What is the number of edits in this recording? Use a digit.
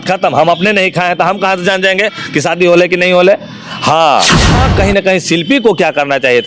1